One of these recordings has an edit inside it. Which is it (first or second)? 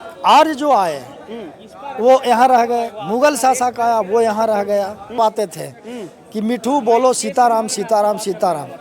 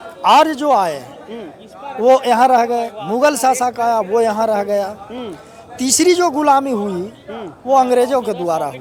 first